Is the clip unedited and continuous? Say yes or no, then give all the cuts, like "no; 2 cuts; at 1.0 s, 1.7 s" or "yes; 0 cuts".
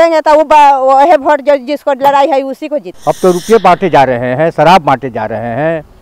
no; 1 cut; at 2.9 s